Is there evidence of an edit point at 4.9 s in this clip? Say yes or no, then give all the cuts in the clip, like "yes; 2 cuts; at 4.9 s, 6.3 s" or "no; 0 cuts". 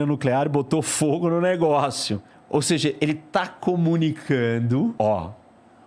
yes; 2 cuts; at 2.3 s, 4.9 s